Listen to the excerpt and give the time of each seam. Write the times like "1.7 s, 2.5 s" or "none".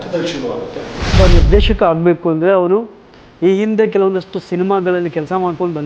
1.2 s